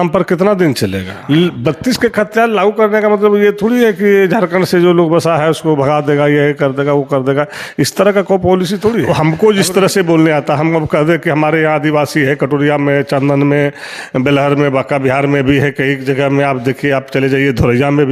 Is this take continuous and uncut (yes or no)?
no